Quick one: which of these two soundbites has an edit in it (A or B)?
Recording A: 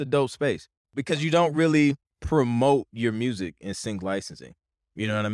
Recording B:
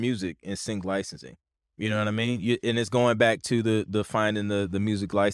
A